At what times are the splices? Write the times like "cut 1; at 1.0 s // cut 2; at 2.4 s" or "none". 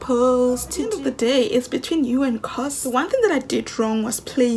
cut 1; at 0.9 s // cut 2; at 2.8 s